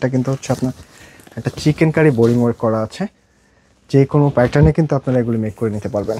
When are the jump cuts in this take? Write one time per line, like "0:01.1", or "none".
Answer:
none